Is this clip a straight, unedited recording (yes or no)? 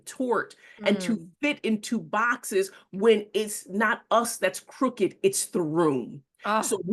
yes